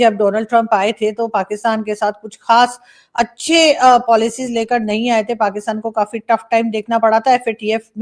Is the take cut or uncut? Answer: uncut